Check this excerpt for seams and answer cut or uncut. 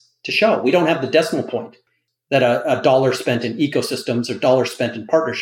cut